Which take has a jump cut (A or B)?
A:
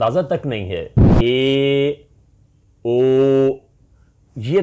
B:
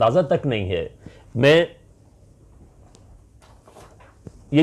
A